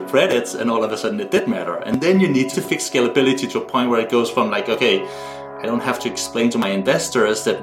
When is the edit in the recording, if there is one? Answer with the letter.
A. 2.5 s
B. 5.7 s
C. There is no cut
A